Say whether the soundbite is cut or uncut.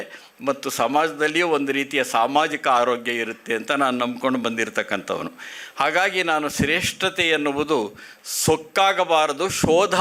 uncut